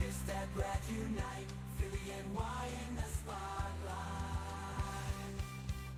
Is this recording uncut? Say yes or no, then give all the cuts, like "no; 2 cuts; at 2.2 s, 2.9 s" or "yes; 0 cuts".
yes; 0 cuts